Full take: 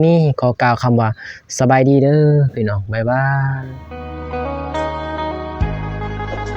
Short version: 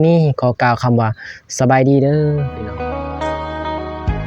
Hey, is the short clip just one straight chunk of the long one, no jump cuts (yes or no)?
no